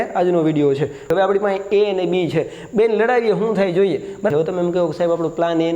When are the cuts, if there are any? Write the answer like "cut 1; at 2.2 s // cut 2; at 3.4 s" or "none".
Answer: cut 1; at 1.1 s // cut 2; at 4.3 s